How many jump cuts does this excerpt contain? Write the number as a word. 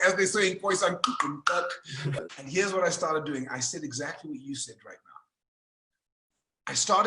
one